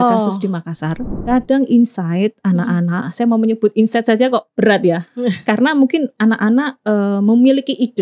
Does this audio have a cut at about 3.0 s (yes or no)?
no